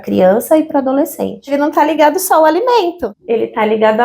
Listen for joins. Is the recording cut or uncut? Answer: cut